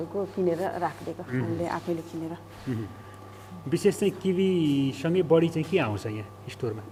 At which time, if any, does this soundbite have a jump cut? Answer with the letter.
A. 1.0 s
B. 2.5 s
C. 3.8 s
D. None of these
D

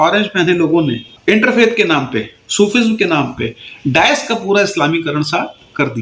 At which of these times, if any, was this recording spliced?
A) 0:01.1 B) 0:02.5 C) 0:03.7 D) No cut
A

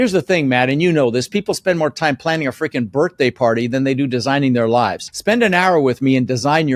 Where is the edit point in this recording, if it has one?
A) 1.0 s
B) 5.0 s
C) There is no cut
C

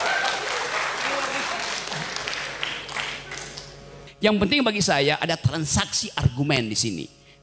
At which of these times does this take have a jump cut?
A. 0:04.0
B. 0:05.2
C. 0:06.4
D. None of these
A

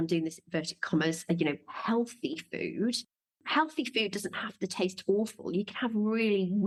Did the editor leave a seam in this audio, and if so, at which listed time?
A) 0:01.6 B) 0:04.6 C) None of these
C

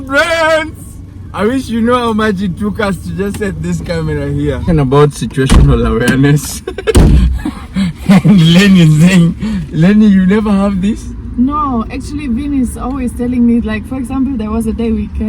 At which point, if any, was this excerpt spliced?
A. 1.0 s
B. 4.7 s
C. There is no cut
B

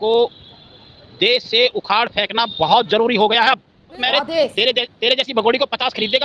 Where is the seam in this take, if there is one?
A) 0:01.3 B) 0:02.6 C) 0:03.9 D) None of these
C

